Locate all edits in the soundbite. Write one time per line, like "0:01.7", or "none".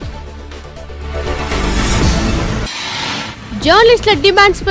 0:02.6

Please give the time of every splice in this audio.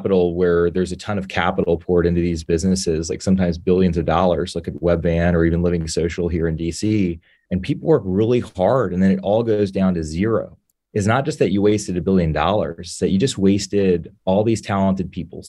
0:10.7

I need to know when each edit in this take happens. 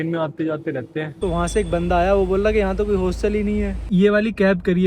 0:01.1
0:03.8

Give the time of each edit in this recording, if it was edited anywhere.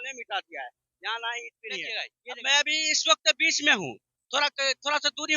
0:02.1

